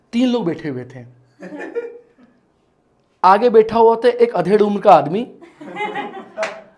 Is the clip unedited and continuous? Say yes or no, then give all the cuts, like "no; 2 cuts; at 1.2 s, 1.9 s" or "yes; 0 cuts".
yes; 0 cuts